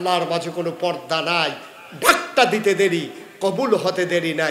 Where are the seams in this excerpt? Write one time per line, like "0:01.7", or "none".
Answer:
none